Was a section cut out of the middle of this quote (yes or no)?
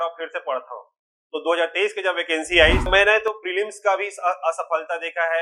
yes